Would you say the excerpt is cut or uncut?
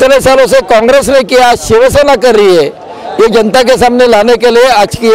uncut